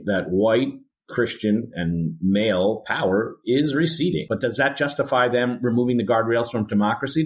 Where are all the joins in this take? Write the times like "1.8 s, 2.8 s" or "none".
4.3 s